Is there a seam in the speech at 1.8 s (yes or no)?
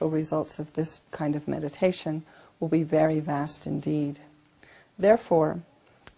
yes